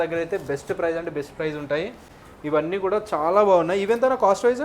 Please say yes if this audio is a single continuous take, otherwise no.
yes